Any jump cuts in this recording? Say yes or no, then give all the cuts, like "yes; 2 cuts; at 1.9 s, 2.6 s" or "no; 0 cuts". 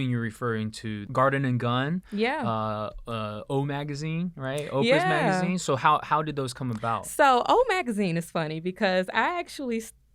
yes; 1 cut; at 1.1 s